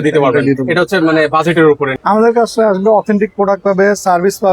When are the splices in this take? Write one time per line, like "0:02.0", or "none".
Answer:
0:01.9